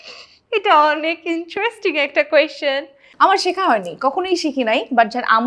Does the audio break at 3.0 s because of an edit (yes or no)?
yes